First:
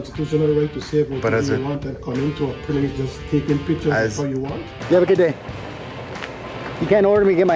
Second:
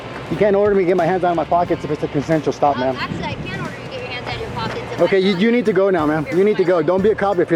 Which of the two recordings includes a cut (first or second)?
first